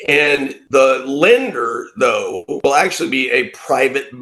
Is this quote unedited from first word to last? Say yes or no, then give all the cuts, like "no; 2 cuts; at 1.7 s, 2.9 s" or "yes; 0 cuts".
yes; 0 cuts